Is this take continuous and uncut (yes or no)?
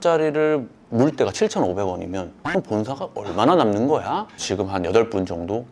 no